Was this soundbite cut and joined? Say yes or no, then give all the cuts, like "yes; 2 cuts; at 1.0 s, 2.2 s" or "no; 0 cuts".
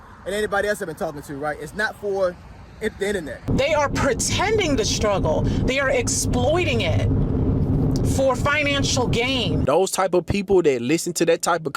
yes; 2 cuts; at 3.5 s, 9.6 s